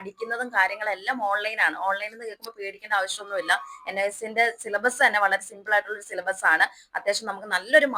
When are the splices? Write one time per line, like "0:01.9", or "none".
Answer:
none